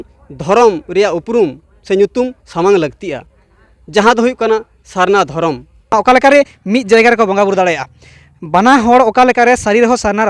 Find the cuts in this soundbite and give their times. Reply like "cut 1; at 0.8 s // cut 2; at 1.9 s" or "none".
cut 1; at 5.9 s